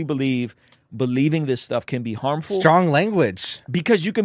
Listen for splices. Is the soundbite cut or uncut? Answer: uncut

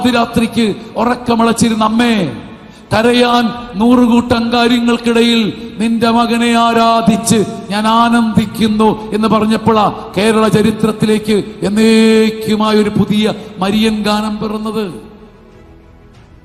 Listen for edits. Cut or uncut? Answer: uncut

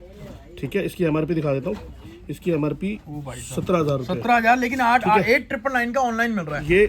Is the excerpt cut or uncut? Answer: uncut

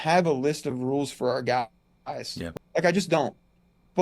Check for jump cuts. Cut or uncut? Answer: cut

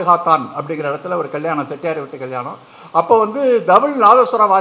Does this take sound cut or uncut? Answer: uncut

